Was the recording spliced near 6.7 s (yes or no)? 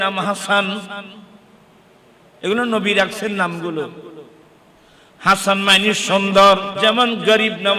yes